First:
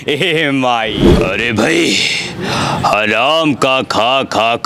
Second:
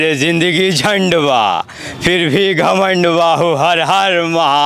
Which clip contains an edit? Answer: first; 1 cut; at 1.0 s

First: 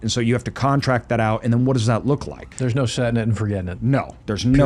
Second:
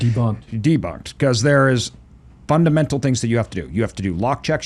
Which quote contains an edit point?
first; 1 cut; at 2.4 s

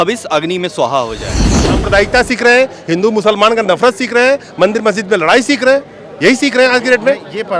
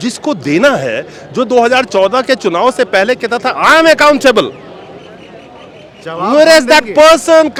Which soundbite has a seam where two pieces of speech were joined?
first; 1 cut; at 1.6 s

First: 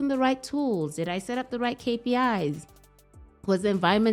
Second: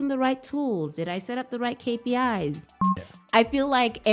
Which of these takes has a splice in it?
second; 1 cut; at 3.1 s

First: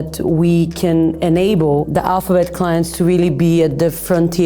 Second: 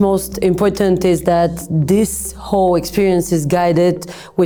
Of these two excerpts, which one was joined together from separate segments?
first; 1 cut; at 1.9 s

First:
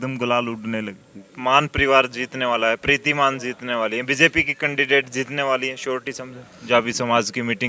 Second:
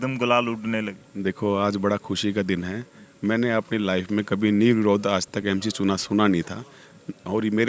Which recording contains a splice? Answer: first; 2 cuts; at 1.0 s, 6.6 s

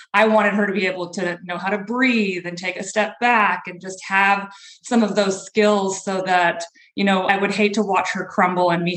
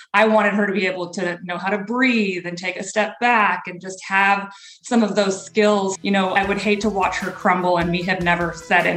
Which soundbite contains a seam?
second; 1 cut; at 6.0 s

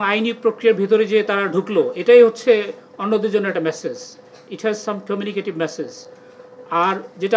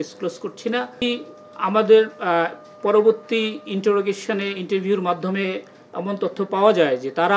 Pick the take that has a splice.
second; 1 cut; at 0.9 s

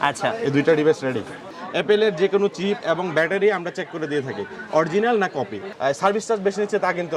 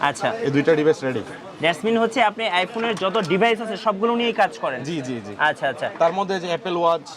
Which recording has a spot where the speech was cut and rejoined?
first; 2 cuts; at 1.5 s, 5.7 s

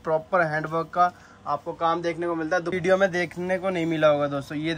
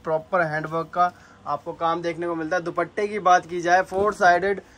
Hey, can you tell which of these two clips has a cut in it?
first; 1 cut; at 2.7 s

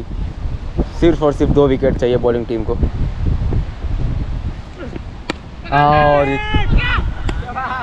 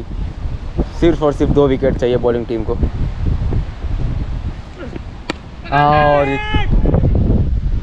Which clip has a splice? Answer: first; 1 cut; at 6.8 s

